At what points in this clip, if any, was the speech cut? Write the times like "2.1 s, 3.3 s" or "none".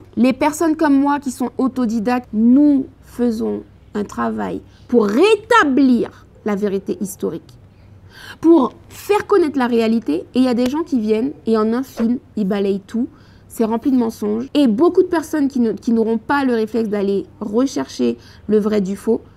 2.2 s